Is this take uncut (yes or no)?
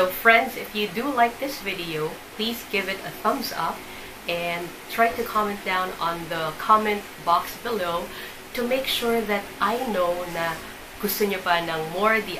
yes